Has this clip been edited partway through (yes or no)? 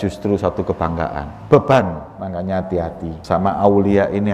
yes